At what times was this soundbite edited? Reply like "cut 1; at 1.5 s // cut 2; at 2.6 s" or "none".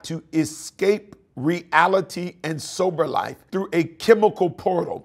cut 1; at 3.4 s